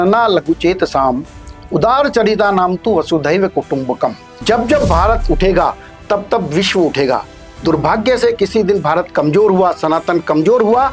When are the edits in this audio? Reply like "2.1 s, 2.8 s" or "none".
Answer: 4.3 s